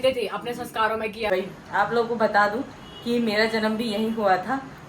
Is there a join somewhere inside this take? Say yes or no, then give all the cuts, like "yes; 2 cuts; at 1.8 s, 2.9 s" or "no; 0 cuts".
yes; 1 cut; at 1.3 s